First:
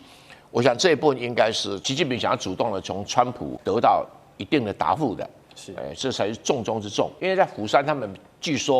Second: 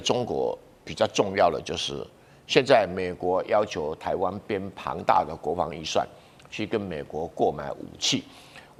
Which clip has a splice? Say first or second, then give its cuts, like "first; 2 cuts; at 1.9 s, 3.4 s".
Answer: first; 3 cuts; at 1.8 s, 3.6 s, 7.1 s